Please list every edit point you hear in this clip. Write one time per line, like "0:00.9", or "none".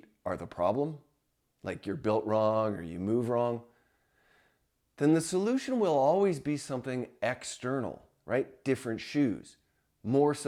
none